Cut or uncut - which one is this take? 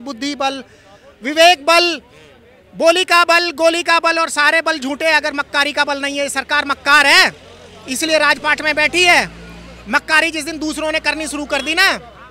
uncut